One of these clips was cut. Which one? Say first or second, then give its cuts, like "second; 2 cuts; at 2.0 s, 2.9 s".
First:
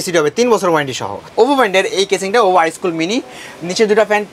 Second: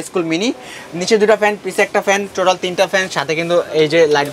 first; 1 cut; at 1.3 s